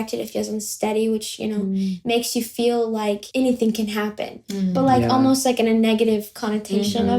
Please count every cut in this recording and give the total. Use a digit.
1